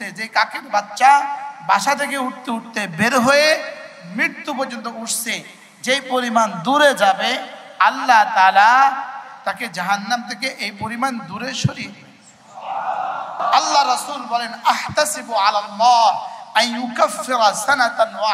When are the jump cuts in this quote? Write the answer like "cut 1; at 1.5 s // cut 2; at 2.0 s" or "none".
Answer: cut 1; at 9.2 s // cut 2; at 13.4 s